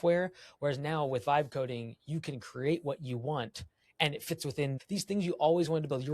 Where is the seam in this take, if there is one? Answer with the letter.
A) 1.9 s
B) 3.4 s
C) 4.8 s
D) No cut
C